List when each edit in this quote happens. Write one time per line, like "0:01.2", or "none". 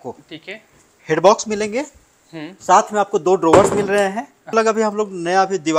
0:04.5